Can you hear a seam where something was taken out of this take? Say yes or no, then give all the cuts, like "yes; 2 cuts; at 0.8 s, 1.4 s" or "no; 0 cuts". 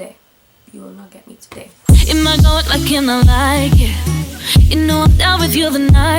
yes; 1 cut; at 1.8 s